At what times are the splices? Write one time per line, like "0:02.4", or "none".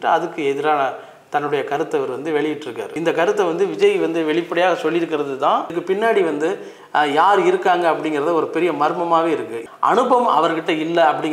0:02.8
0:05.8
0:09.6